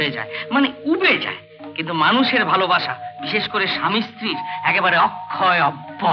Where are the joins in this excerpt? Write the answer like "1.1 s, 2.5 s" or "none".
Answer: none